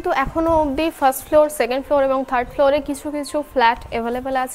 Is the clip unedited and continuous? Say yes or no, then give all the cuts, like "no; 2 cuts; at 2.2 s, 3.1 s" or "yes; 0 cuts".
yes; 0 cuts